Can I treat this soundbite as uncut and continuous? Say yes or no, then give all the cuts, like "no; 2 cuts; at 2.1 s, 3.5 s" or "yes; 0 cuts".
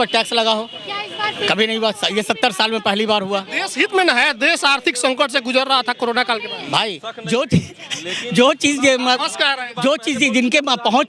yes; 0 cuts